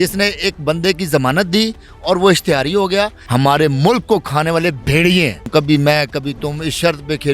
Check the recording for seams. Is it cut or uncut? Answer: cut